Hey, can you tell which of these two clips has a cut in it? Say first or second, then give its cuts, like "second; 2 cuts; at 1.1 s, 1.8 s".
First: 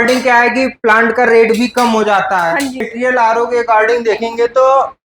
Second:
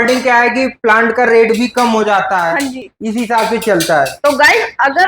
first; 1 cut; at 2.9 s